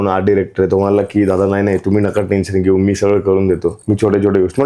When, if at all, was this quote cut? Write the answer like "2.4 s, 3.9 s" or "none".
3.7 s

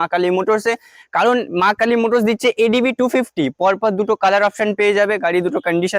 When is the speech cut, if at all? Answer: none

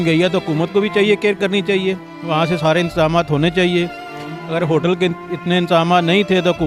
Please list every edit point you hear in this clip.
none

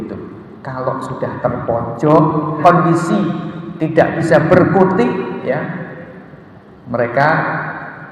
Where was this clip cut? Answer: 2.6 s

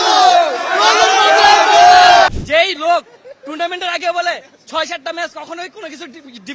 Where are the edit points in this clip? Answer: 2.3 s

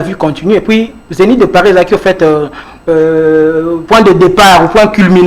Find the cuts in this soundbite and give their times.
none

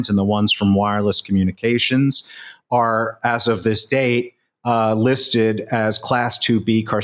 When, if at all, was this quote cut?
none

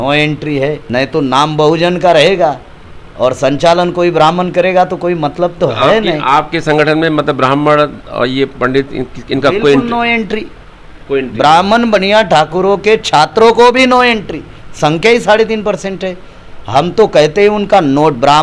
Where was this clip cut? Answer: none

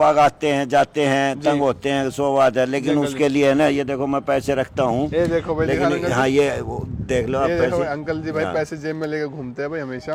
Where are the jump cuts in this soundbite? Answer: none

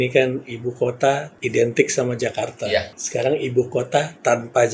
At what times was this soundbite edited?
1.3 s, 3.0 s

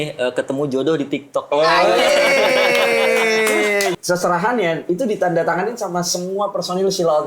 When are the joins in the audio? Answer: 4.0 s

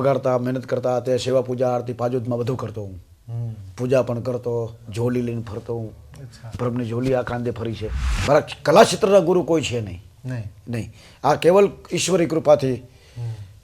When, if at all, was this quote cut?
8.1 s

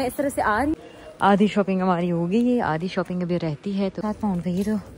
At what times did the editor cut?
0.8 s, 4.0 s

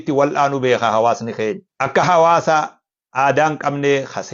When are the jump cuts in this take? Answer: 1.7 s

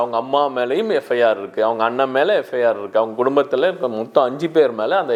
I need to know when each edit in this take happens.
none

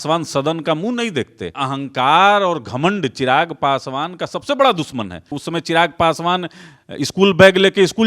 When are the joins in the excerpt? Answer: 1.6 s, 5.4 s

